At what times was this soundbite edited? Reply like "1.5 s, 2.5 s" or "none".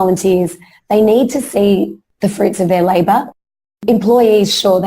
2.0 s, 3.6 s